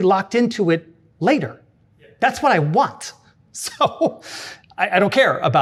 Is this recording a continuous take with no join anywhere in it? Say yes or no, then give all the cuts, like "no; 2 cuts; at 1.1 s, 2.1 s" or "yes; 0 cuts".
yes; 0 cuts